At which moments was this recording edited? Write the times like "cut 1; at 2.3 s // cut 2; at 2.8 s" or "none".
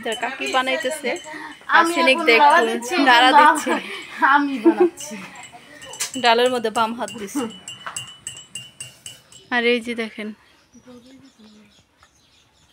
cut 1; at 9.5 s